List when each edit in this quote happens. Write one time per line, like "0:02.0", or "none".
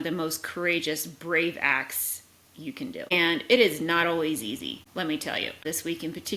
0:03.1
0:04.8
0:05.6